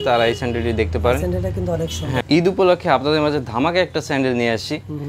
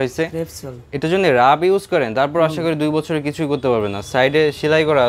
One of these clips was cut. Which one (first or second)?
first